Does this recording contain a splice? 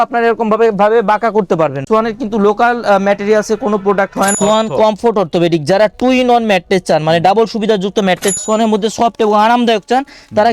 yes; 3 cuts; at 1.8 s, 4.3 s, 8.4 s

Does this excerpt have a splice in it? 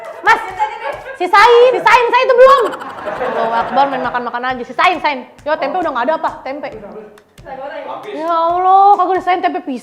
yes; 1 cut; at 1.8 s

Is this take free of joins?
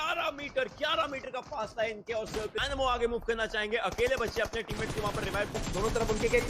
no; 2 cuts; at 2.6 s, 5.6 s

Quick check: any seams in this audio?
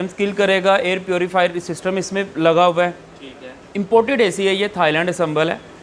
no; 0 cuts

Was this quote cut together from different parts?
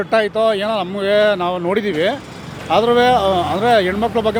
no; 0 cuts

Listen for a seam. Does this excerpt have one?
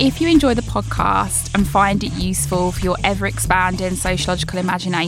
no; 0 cuts

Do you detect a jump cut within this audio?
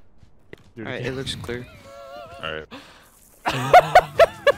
no; 0 cuts

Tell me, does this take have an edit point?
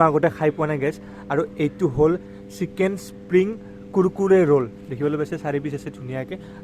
no; 0 cuts

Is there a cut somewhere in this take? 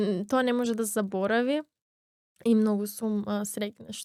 no; 0 cuts

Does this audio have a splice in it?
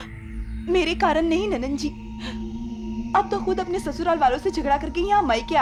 no; 0 cuts

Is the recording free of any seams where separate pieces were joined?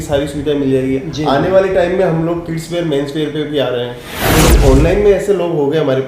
no; 1 cut; at 4.5 s

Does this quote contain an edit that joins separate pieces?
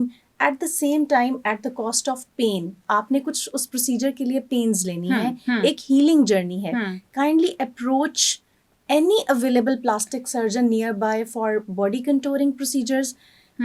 no; 0 cuts

